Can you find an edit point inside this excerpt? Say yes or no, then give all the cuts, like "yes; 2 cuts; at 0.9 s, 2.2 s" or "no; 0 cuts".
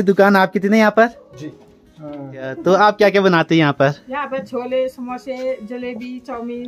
yes; 1 cut; at 2.6 s